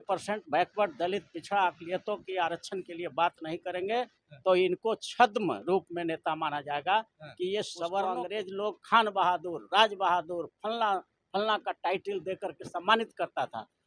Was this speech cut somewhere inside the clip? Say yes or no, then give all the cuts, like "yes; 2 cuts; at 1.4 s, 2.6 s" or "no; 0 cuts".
yes; 1 cut; at 8.2 s